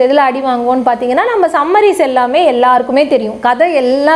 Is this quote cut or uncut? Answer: uncut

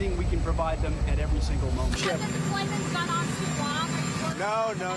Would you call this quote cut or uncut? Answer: cut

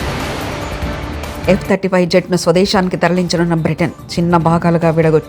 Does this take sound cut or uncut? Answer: cut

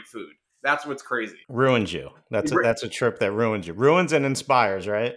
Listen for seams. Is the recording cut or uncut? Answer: cut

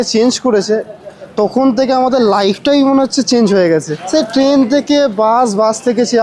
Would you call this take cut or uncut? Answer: cut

